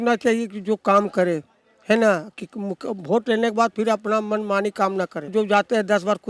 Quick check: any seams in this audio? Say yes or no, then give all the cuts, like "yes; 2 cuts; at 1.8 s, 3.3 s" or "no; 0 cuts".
yes; 1 cut; at 5.3 s